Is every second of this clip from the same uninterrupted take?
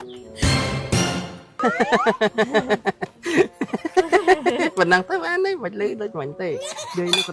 no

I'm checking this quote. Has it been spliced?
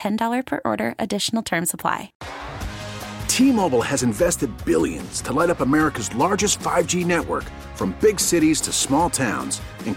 yes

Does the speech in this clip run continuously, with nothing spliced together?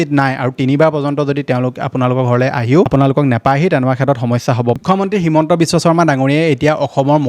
no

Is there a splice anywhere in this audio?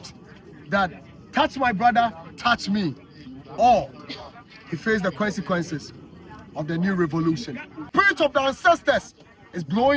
yes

